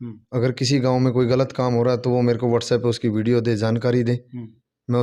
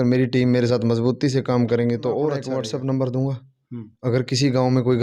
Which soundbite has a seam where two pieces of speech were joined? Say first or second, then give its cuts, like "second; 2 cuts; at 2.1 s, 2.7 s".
second; 1 cut; at 2.5 s